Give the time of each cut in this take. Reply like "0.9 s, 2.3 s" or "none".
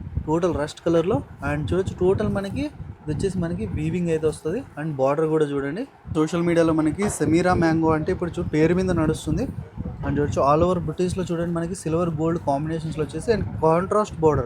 6.1 s